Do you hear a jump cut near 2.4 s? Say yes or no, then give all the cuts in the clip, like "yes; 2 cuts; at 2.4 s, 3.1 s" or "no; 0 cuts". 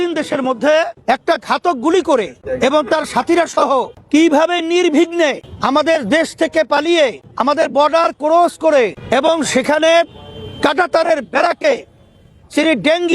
yes; 6 cuts; at 0.9 s, 2.4 s, 4.0 s, 5.5 s, 7.3 s, 9.0 s